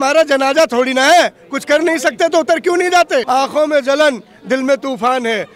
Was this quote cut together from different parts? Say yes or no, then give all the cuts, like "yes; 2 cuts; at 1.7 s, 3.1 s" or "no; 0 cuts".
yes; 1 cut; at 3.3 s